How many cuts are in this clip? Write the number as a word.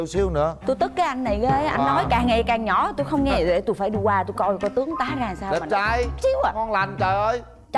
zero